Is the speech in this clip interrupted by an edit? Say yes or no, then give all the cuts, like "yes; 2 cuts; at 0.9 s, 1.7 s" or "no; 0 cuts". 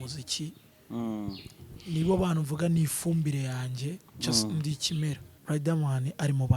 yes; 1 cut; at 5.3 s